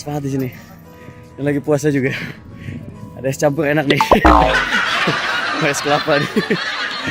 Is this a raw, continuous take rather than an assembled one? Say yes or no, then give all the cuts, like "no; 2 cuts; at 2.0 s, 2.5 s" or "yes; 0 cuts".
yes; 0 cuts